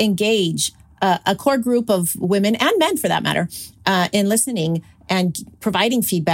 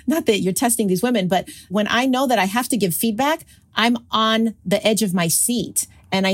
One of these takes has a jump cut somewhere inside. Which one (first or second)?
second